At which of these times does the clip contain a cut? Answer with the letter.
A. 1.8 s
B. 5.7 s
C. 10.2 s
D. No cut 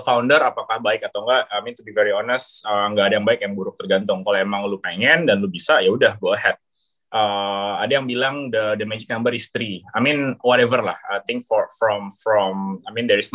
D